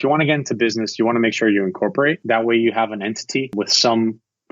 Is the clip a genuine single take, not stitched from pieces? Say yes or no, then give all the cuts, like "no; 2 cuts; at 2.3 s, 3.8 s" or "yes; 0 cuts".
no; 2 cuts; at 2.2 s, 3.5 s